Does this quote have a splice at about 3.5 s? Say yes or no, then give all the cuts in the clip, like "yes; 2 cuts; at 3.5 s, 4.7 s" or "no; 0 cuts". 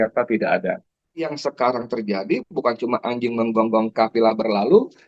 no; 1 cut; at 1.4 s